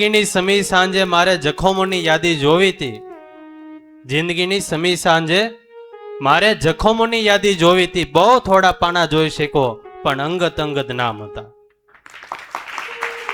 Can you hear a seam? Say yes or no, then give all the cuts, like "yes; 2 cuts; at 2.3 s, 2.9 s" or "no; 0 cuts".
no; 0 cuts